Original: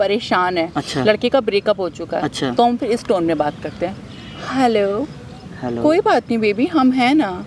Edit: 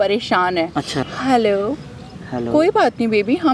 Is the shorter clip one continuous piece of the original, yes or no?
no